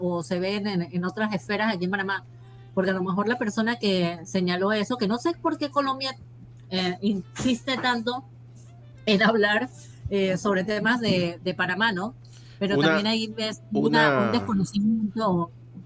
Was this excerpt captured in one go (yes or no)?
yes